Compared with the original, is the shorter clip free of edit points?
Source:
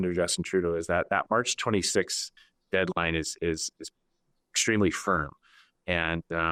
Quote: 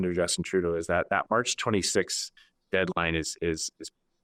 yes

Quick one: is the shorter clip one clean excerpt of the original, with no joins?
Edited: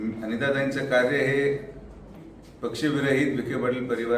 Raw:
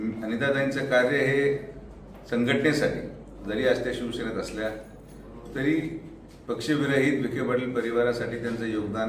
no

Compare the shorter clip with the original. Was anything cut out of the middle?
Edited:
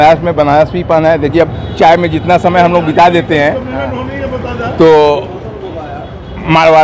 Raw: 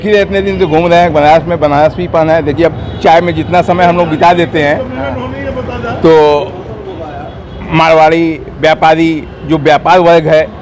no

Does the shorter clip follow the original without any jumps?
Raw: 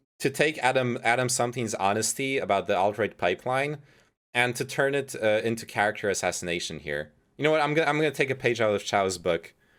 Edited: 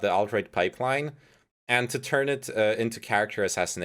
yes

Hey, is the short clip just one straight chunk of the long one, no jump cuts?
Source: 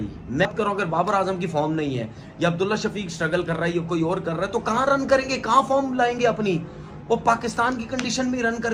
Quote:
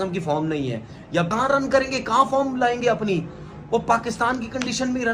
no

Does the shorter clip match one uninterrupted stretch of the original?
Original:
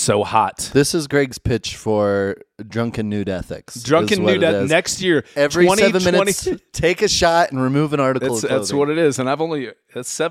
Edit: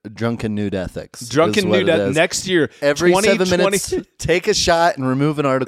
yes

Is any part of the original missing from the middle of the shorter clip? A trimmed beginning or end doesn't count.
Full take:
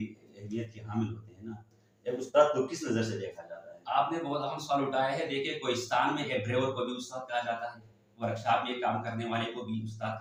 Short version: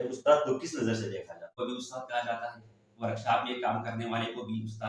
yes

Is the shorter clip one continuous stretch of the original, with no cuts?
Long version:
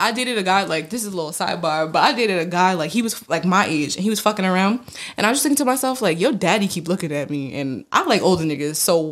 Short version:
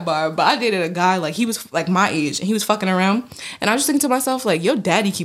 yes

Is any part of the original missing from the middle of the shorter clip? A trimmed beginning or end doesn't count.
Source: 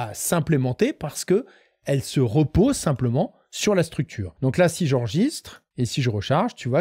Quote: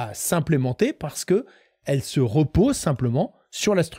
no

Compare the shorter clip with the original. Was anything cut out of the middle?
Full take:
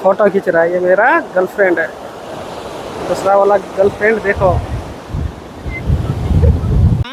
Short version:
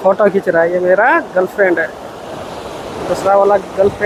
no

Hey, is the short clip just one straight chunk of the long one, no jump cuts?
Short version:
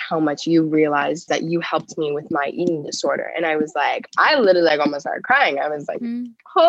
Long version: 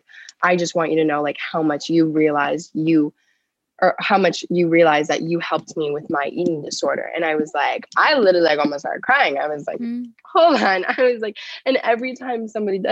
no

